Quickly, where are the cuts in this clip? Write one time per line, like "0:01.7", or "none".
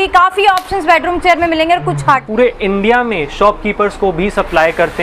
0:02.3